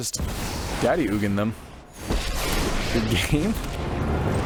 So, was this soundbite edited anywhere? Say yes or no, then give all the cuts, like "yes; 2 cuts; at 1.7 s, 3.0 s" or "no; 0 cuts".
no; 0 cuts